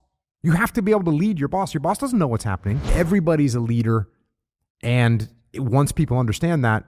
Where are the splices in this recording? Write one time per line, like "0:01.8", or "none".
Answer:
0:02.8

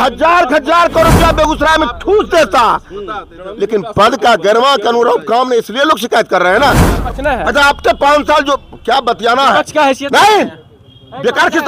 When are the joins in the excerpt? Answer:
0:07.1

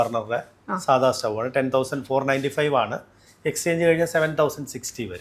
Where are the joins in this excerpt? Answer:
none

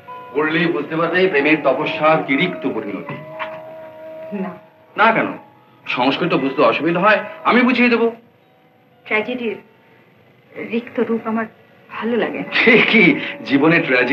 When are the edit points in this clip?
none

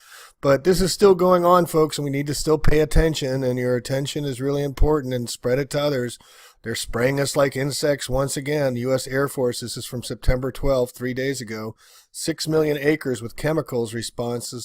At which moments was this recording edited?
0:06.0

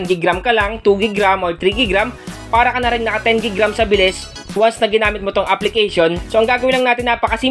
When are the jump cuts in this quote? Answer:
0:06.2

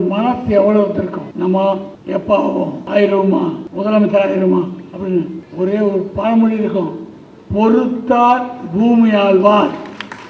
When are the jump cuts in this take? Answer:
0:01.3
0:01.9
0:02.8
0:03.7
0:05.4

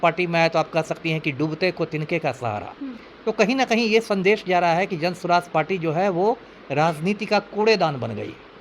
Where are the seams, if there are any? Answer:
0:03.1

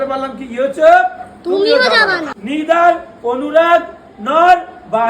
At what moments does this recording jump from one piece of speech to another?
0:02.3

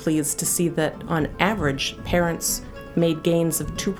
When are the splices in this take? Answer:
none

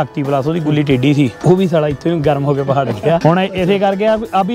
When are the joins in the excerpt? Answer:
0:01.4
0:03.2

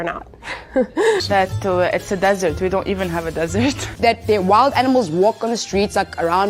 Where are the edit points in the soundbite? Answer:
0:01.2
0:03.9

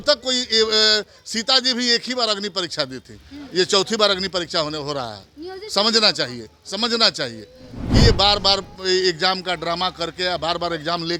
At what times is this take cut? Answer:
none

